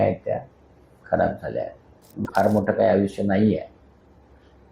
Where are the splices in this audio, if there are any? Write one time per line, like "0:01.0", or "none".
0:02.2